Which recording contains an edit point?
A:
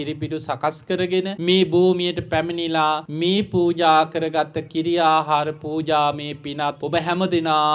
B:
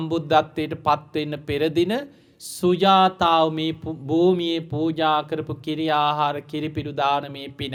A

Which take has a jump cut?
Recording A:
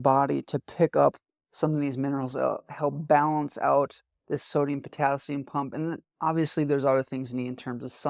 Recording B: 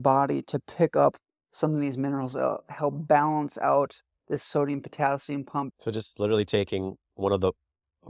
B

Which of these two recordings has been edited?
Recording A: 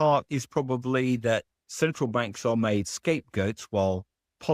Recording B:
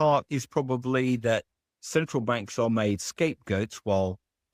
A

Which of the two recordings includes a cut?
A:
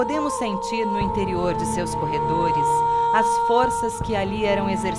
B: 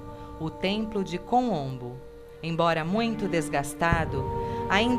A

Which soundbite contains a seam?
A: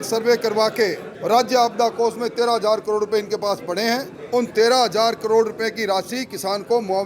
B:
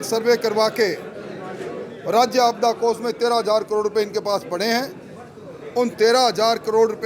A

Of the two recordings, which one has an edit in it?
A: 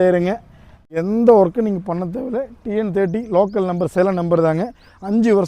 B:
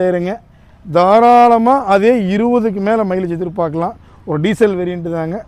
A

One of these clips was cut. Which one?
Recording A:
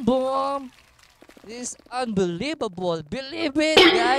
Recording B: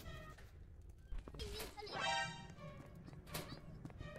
B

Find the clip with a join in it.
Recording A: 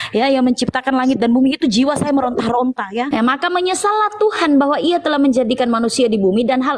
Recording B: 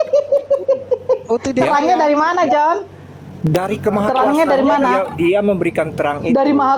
A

